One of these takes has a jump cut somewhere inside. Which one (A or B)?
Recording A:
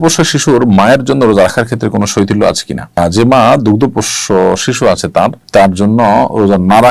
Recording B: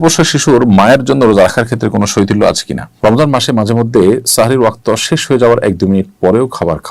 B